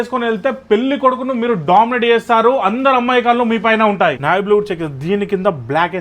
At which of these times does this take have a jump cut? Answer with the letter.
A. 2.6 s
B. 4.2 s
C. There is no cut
B